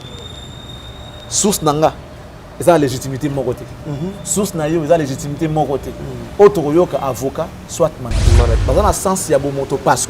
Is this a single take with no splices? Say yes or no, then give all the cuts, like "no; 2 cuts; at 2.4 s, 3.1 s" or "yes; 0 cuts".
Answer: no; 1 cut; at 8.6 s